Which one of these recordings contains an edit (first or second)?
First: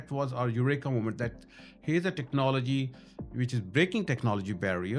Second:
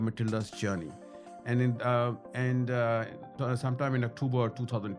second